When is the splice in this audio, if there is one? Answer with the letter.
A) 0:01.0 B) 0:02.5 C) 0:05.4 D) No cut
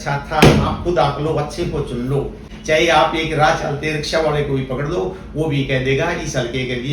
B